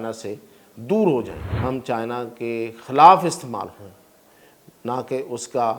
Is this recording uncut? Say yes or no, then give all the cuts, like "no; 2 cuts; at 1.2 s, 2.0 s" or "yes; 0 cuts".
no; 1 cut; at 1.4 s